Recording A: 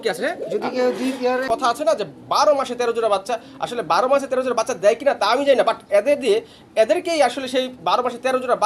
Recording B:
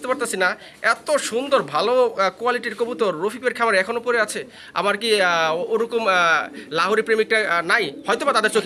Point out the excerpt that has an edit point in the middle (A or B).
A